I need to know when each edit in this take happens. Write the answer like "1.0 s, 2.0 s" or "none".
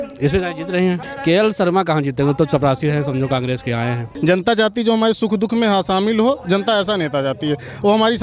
1.0 s, 4.1 s